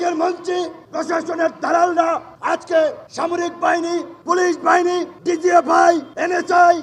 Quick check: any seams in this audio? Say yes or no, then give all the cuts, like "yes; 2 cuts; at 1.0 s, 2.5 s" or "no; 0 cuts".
no; 0 cuts